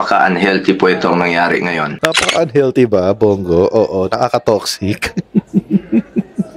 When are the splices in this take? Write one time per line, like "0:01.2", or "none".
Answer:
0:01.9